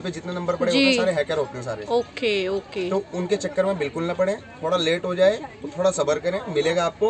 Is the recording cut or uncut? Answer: uncut